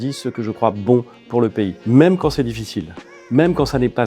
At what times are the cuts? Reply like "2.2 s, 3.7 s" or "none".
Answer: 1.8 s